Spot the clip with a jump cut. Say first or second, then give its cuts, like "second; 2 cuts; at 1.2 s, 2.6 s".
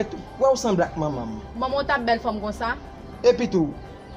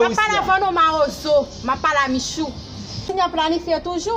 second; 1 cut; at 3.0 s